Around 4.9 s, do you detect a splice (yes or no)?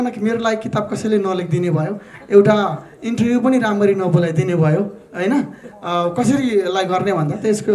no